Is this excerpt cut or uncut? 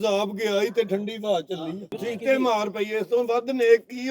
cut